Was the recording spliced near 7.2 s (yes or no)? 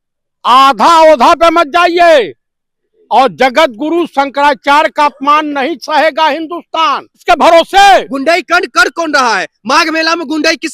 yes